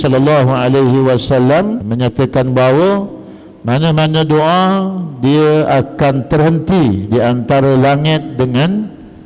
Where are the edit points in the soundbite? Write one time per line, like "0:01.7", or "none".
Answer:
0:01.9